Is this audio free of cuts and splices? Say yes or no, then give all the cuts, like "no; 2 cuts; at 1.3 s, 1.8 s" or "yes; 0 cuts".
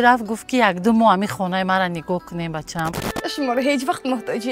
no; 1 cut; at 3.1 s